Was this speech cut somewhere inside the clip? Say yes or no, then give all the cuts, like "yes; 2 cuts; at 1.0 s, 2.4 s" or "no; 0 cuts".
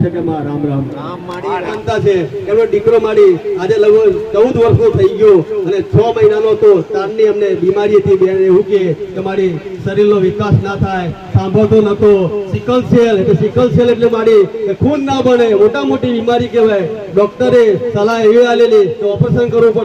yes; 1 cut; at 1.8 s